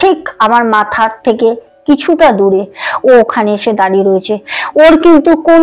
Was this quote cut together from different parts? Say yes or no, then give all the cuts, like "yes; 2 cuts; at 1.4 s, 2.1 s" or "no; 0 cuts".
no; 0 cuts